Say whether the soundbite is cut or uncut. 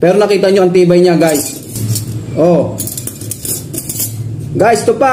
cut